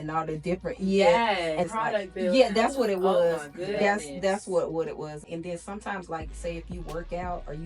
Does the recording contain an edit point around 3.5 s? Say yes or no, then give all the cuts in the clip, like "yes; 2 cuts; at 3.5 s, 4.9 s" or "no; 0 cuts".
no; 2 cuts; at 1.7 s, 5.2 s